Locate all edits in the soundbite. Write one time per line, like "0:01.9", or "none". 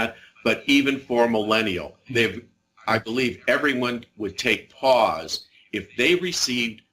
none